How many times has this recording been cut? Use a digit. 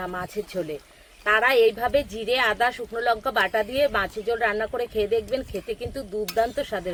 0